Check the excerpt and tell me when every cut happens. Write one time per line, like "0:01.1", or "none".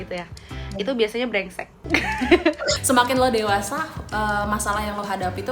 0:02.8